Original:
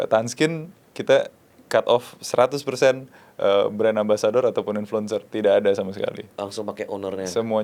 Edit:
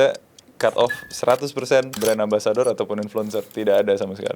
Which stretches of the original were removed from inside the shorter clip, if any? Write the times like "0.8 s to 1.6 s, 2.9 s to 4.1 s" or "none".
3.1 s to 3.7 s